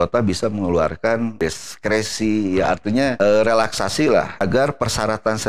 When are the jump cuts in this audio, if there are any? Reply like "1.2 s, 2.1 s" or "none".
1.4 s, 3.1 s, 4.3 s